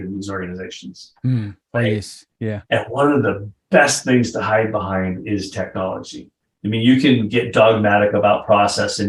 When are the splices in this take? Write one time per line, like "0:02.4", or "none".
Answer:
0:06.3